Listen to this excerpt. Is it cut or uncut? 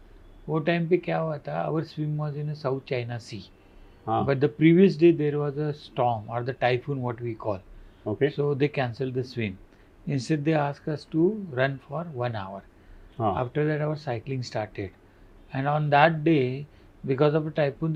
uncut